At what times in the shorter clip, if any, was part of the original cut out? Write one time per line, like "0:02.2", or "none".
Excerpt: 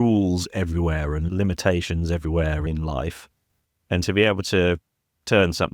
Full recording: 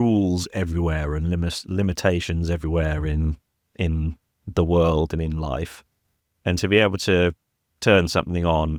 0:01.2
0:02.7

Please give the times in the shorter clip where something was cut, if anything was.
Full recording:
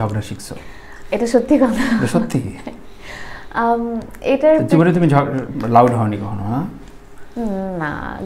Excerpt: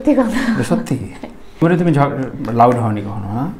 0:01.6

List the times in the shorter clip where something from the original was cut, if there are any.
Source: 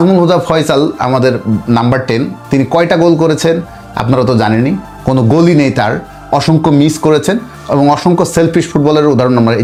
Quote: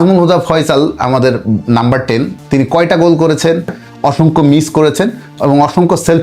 0:03.8

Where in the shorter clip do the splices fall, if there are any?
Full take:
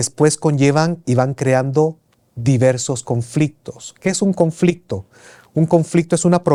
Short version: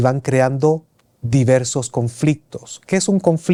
none

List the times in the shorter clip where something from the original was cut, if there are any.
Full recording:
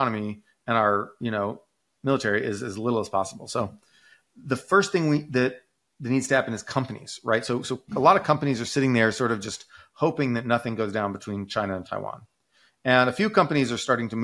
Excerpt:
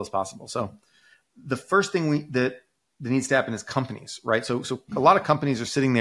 none

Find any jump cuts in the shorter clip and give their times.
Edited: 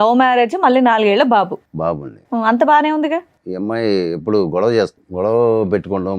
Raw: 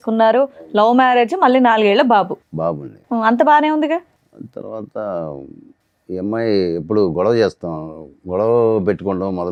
0:03.4
0:05.0

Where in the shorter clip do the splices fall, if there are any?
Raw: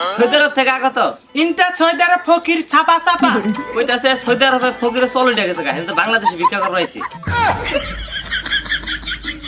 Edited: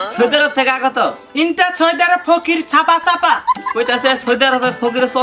none

